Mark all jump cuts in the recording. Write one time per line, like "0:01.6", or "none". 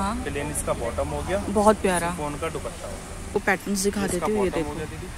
0:03.3